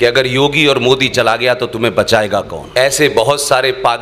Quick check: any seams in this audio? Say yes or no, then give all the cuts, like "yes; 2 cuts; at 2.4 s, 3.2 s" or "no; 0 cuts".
yes; 1 cut; at 2.6 s